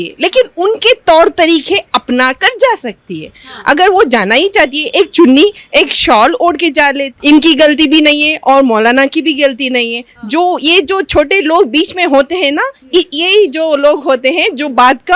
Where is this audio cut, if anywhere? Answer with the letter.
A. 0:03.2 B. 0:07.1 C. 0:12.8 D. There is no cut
B